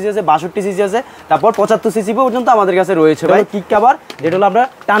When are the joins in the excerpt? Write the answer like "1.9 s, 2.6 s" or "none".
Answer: 3.3 s